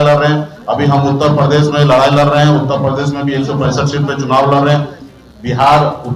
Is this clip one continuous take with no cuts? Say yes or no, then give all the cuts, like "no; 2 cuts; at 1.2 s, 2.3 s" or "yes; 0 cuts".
no; 1 cut; at 5.0 s